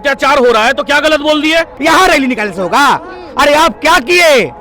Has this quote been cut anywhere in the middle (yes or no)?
yes